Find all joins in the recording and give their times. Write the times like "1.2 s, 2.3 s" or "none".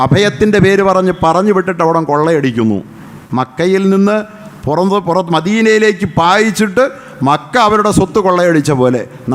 none